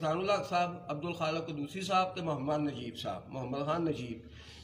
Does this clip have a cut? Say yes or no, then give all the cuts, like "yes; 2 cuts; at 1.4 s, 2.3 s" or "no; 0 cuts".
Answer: no; 0 cuts